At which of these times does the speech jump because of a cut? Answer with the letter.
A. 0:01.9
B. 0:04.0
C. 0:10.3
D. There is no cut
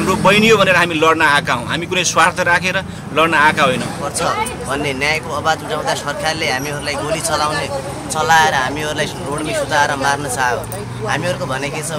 B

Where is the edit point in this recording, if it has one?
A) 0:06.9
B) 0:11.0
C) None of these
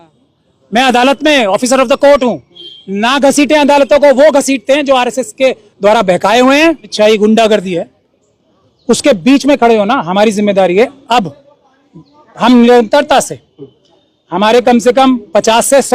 A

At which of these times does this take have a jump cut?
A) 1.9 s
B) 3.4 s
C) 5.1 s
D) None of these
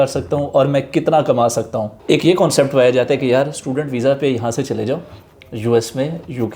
A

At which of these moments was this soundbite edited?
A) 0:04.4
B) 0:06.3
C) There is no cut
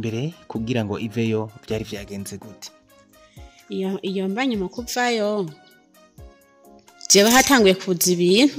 C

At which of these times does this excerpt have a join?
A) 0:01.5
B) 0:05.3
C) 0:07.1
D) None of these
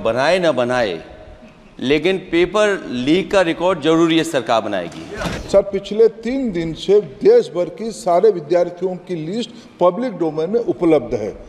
B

